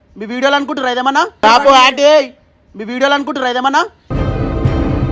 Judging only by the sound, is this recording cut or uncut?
cut